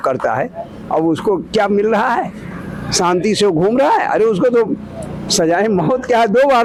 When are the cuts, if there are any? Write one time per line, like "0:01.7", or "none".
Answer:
none